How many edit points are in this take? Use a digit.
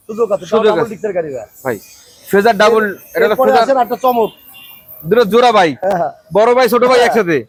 0